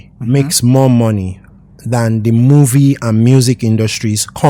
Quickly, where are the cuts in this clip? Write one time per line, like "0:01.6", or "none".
none